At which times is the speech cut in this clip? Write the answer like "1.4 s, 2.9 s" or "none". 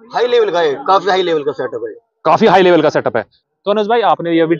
3.4 s